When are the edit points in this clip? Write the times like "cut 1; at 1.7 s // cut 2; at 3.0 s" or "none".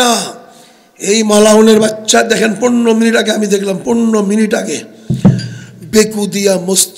none